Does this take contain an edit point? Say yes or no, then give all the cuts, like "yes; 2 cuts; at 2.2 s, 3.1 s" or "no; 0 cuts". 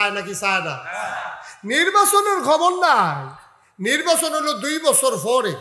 no; 0 cuts